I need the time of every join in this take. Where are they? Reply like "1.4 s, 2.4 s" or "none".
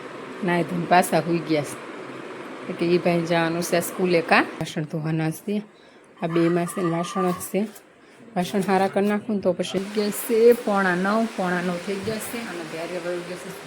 4.7 s, 9.8 s